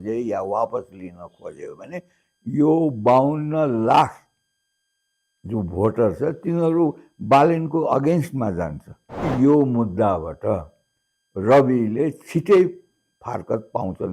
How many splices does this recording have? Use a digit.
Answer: 1